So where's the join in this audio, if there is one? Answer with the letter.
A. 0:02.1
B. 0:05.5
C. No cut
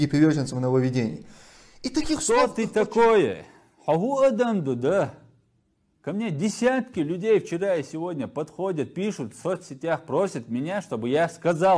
A